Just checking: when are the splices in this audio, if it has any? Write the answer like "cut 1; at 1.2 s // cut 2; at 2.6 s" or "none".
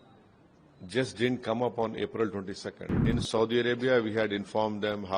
cut 1; at 3.0 s